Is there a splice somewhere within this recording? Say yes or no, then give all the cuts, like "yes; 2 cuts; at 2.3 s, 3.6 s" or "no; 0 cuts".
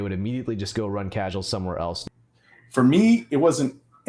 yes; 1 cut; at 2.0 s